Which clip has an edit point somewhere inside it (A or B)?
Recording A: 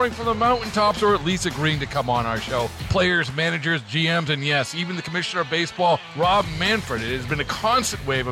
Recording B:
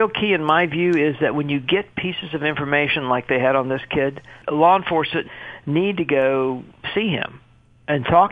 B